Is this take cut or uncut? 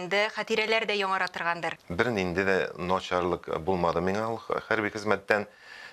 cut